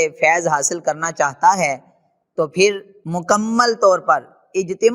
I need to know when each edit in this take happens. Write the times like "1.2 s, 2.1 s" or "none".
2.9 s